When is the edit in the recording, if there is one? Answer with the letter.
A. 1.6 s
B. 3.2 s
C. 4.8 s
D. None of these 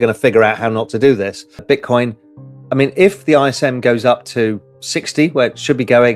A